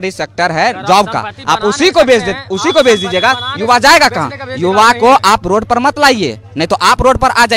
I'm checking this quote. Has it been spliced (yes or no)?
no